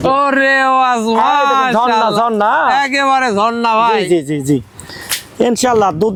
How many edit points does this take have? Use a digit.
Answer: 0